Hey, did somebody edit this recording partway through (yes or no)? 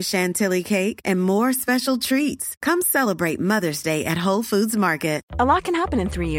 no